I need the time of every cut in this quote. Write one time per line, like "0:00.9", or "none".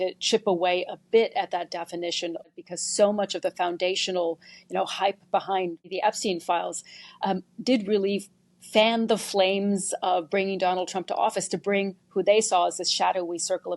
0:02.5
0:05.9